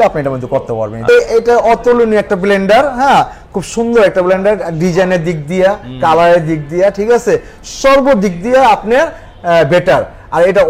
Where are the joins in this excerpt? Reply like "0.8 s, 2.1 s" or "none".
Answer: 1.0 s